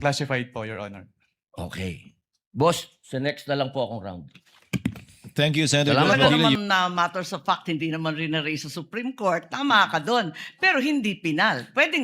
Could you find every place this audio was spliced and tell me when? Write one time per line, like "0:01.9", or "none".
0:06.6